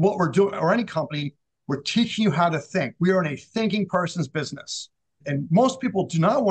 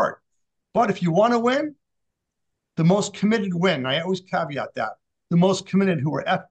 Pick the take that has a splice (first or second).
first